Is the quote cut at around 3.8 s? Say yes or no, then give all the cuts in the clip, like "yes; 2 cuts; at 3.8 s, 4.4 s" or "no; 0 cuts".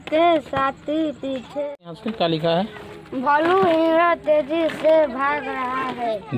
no; 1 cut; at 2.0 s